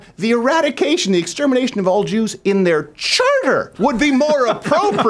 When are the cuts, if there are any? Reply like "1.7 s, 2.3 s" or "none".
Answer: none